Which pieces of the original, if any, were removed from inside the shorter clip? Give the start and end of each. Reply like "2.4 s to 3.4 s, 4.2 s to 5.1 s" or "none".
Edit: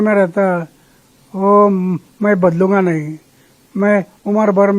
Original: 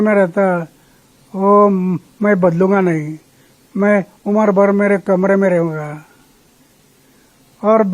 none